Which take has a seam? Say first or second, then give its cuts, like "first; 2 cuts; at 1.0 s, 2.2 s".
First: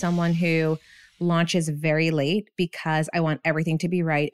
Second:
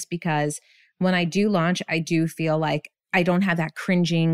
second; 1 cut; at 2.9 s